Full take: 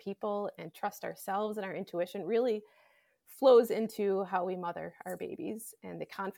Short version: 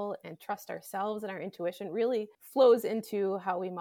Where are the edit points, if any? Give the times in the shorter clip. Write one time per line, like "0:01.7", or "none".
0:02.4